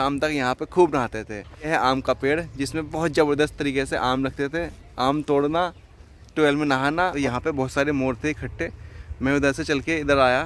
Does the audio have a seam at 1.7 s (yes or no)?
yes